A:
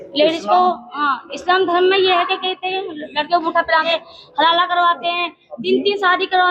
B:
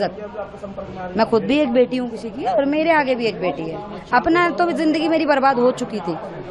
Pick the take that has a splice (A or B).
A